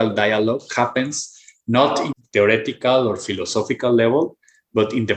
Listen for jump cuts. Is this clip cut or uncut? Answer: cut